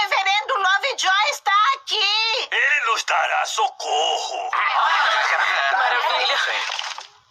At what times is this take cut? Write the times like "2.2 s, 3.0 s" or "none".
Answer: 3.5 s, 4.4 s